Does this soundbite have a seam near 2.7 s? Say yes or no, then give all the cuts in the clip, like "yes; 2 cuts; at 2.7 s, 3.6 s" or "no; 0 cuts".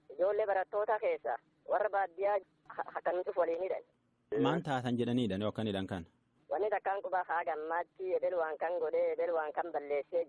no; 1 cut; at 6.5 s